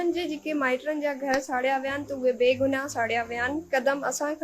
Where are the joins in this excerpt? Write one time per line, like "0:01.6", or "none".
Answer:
none

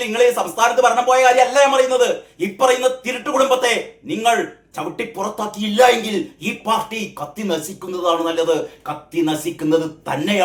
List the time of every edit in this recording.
none

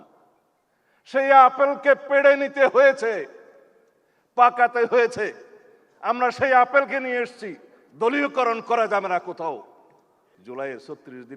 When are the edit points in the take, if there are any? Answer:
0:10.3

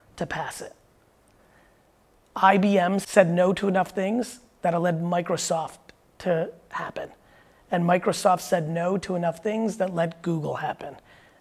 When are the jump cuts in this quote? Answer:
0:03.0

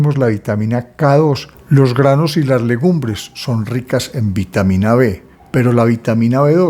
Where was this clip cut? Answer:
0:01.5

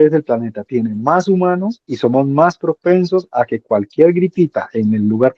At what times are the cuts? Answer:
0:01.8

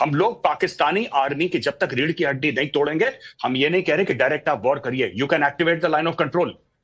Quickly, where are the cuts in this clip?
none

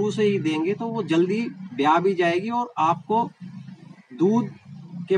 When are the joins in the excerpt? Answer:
none

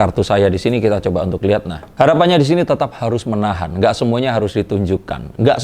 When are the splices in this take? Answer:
0:01.8

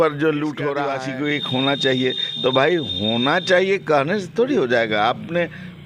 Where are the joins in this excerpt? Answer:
0:01.0

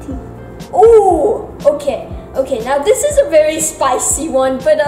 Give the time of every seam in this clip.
none

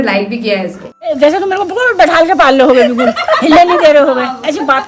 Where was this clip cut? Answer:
0:01.0

